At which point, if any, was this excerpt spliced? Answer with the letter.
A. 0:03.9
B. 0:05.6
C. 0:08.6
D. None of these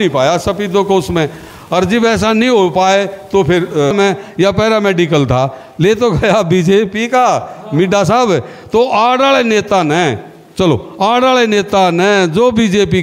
A